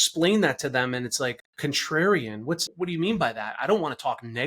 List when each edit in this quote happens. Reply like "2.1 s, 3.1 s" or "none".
1.5 s, 2.7 s